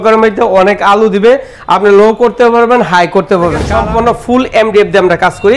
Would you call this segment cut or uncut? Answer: cut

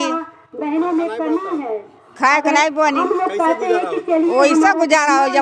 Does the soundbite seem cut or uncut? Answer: uncut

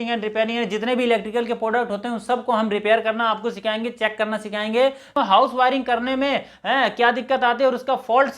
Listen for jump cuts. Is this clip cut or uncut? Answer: cut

